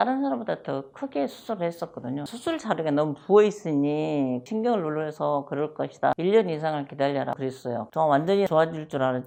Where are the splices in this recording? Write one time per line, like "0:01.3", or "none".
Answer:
none